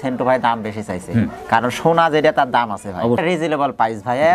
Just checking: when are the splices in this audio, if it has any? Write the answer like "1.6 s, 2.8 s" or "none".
3.2 s